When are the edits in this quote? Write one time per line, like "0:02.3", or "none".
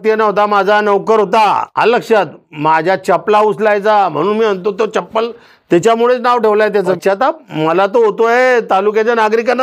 0:01.7
0:07.0